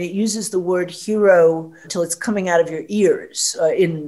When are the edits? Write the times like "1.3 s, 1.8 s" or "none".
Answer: 1.9 s